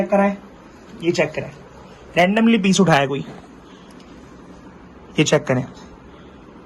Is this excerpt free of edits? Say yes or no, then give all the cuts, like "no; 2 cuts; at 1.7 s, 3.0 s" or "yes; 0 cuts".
yes; 0 cuts